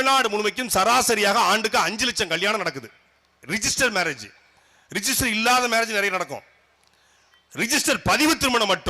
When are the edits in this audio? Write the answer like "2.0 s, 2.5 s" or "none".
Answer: none